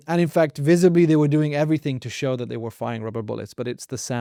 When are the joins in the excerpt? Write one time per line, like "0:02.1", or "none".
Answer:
none